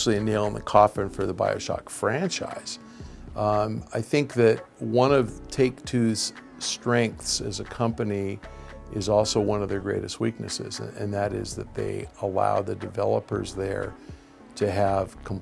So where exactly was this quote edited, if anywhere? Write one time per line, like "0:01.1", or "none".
none